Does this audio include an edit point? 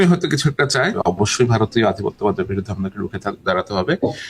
yes; 1 cut; at 0.9 s

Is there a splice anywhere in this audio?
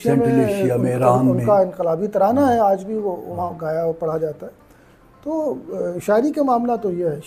no; 0 cuts

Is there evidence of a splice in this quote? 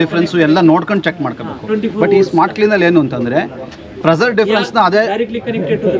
no; 0 cuts

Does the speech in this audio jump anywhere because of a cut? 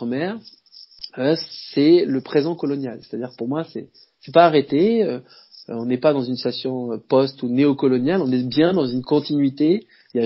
no; 0 cuts

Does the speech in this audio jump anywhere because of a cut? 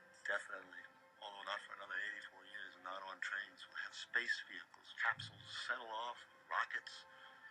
yes; 1 cut; at 1.6 s

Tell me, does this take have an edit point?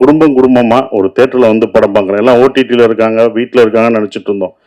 no; 0 cuts

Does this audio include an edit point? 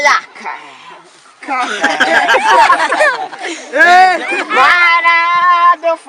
yes; 1 cut; at 4.2 s

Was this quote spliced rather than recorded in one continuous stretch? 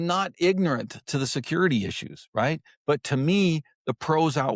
no; 0 cuts

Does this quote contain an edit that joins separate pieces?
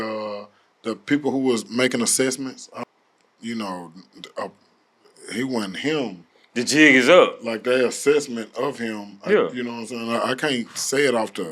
yes; 1 cut; at 2.7 s

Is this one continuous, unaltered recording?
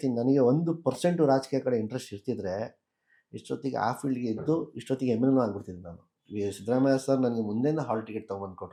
yes; 0 cuts

